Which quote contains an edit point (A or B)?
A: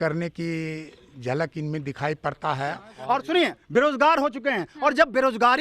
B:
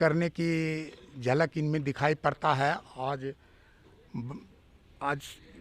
A